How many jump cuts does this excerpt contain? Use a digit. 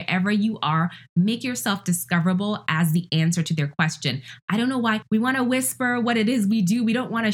1